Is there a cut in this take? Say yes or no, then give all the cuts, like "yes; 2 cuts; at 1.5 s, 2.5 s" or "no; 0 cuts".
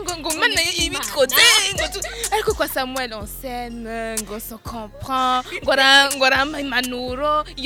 no; 0 cuts